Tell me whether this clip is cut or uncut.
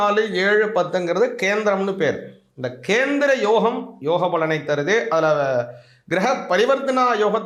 uncut